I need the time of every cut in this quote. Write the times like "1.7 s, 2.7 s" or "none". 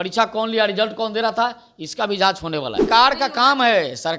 2.9 s